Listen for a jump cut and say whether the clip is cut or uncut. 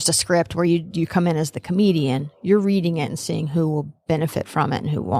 uncut